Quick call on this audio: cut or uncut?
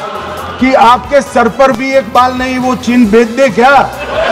uncut